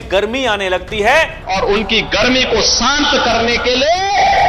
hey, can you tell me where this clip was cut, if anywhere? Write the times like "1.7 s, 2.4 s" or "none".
1.4 s